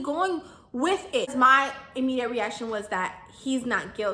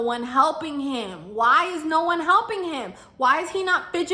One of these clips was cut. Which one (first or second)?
first